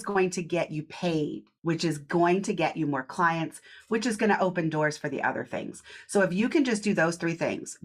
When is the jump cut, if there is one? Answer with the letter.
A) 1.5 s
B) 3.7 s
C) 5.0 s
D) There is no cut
A